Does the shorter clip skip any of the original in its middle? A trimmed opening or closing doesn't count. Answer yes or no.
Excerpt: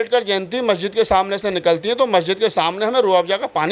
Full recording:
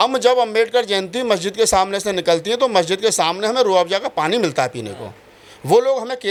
no